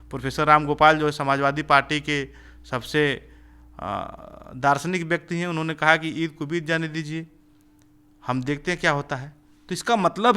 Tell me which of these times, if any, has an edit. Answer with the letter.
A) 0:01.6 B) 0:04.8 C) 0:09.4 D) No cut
D